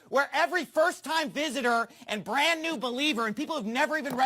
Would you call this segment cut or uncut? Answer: cut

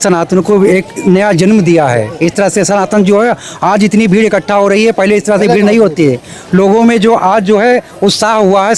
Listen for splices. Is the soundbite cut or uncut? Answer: uncut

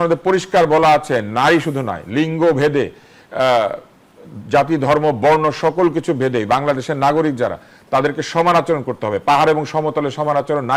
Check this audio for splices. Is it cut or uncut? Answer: uncut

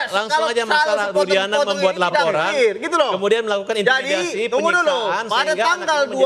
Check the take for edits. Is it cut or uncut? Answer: uncut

